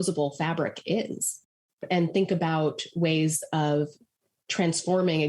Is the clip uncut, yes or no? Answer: no